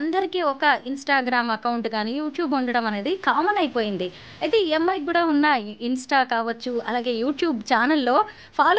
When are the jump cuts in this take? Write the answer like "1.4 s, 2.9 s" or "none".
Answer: none